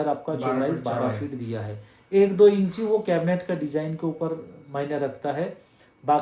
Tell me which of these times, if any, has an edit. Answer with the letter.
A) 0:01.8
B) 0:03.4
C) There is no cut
C